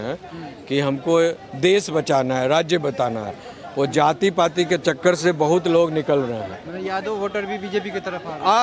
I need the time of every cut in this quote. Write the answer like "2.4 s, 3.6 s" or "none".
none